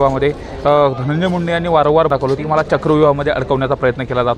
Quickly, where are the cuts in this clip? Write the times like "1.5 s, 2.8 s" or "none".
2.1 s